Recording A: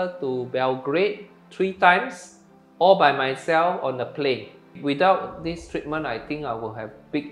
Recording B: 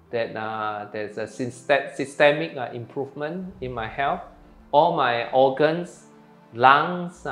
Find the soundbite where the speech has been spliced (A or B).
A